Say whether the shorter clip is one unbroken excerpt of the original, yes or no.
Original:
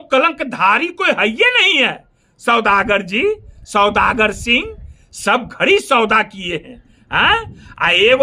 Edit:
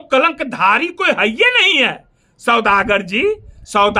yes